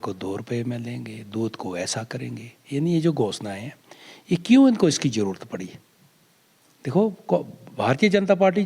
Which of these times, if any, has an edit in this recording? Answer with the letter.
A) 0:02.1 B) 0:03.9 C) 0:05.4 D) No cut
D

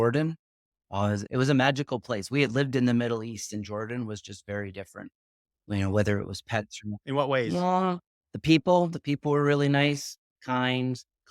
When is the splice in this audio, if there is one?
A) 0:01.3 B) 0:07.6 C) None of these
A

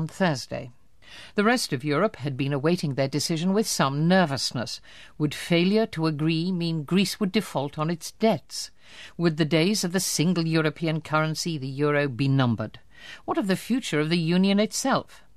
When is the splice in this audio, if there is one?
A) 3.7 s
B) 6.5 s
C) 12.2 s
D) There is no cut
C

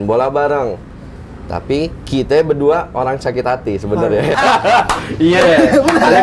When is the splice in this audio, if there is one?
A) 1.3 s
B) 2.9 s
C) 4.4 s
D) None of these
C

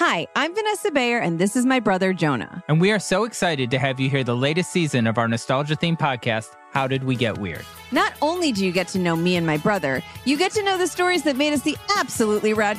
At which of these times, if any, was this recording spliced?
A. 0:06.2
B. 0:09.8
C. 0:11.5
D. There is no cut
D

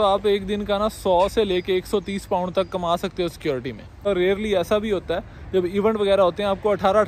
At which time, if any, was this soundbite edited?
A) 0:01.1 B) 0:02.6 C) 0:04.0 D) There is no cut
C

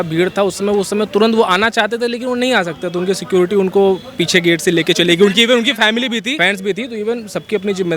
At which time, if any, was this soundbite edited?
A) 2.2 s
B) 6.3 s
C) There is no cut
B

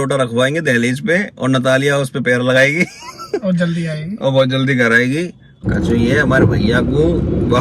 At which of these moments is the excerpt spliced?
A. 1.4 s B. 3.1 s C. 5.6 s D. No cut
C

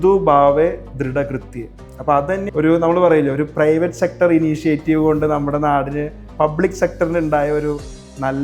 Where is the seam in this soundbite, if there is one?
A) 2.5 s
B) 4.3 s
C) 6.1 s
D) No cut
A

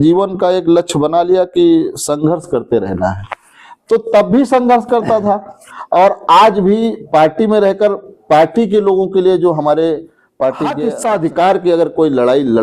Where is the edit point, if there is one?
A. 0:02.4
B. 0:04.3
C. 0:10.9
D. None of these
C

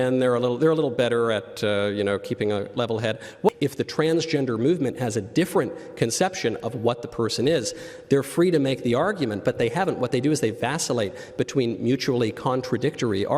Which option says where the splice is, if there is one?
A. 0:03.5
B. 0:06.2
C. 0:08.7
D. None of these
A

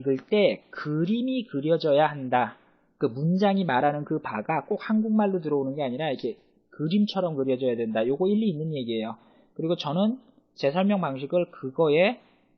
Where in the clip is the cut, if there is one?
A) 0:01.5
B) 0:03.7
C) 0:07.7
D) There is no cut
A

